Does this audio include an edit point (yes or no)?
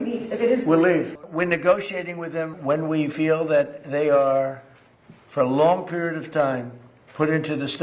yes